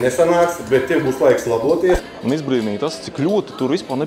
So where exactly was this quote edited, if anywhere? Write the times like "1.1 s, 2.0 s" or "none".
2.0 s